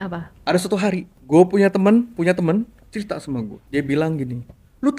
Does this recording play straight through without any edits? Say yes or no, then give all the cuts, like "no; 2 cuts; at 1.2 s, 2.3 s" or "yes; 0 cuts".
no; 2 cuts; at 1.1 s, 3.6 s